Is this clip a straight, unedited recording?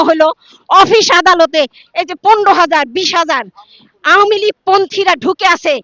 yes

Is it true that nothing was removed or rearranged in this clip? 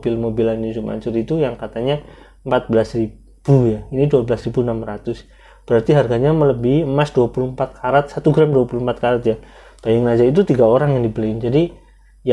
yes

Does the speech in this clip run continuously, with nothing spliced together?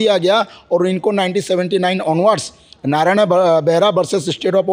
yes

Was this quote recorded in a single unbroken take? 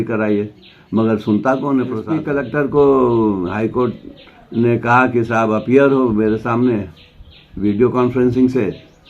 no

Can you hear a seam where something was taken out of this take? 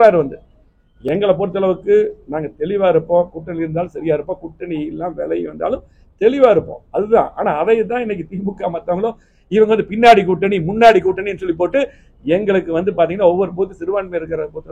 no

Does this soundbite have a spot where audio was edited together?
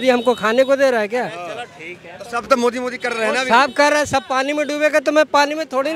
no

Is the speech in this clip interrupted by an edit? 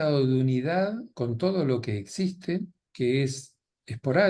yes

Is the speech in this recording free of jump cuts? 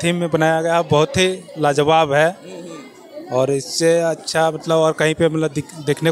yes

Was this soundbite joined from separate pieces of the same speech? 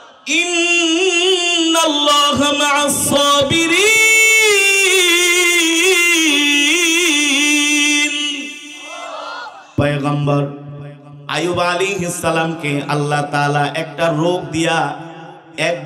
yes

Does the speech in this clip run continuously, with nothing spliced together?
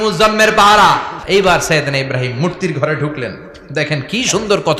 no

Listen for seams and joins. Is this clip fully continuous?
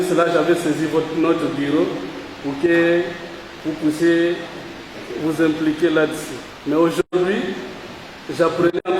yes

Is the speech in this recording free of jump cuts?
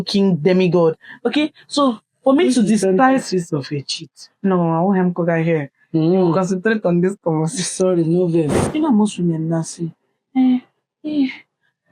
no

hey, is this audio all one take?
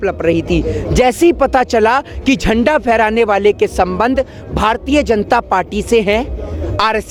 yes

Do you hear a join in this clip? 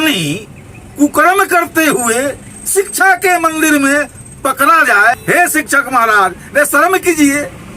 yes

